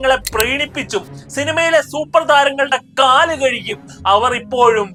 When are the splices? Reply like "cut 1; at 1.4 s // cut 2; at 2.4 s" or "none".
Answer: none